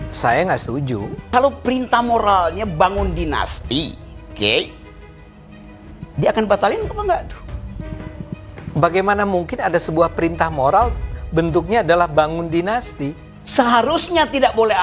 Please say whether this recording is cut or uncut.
cut